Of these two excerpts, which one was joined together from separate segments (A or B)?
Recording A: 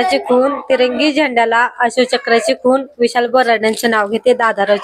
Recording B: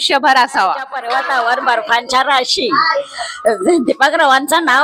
B